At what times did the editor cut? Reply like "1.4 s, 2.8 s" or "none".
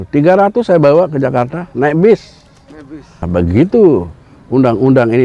3.3 s